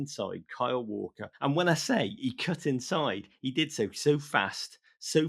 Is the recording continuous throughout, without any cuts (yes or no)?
no